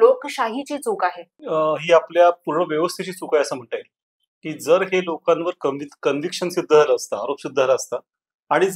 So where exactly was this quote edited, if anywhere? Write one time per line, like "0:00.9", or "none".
0:01.3